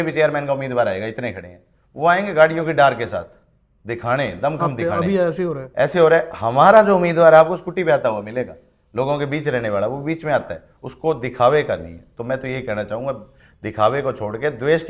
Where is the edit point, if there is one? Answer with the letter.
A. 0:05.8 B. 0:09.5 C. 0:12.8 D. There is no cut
D